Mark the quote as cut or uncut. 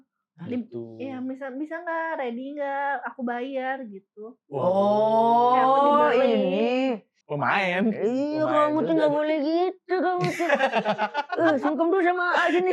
cut